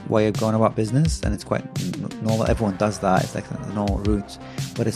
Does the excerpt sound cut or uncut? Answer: uncut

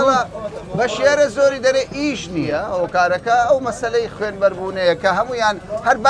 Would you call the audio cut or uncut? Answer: cut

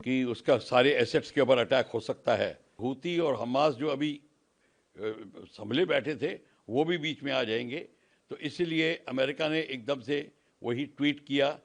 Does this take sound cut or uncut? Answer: cut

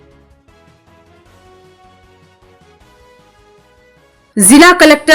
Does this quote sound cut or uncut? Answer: uncut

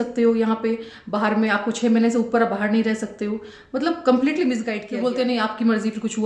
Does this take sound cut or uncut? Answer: cut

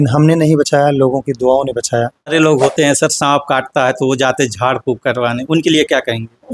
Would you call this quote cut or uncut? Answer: cut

